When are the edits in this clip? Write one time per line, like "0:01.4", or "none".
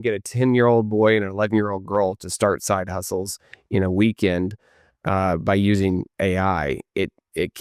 none